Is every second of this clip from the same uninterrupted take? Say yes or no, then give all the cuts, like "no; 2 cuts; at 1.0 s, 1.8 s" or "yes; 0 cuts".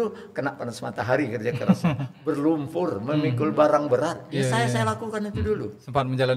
yes; 0 cuts